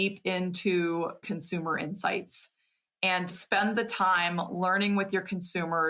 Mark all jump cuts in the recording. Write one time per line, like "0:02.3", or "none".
0:01.2
0:03.3